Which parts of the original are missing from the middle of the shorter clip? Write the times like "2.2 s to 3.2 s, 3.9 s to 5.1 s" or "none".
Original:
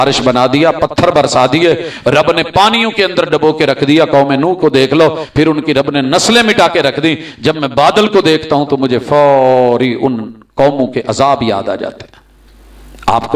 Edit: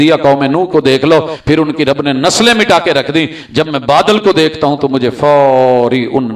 none